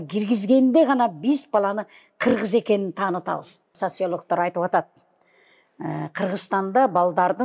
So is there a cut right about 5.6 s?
no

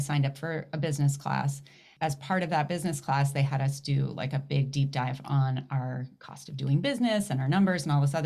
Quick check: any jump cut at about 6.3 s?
no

